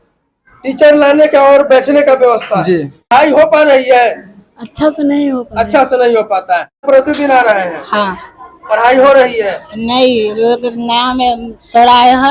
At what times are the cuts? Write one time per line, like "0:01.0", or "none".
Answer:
0:03.1
0:06.8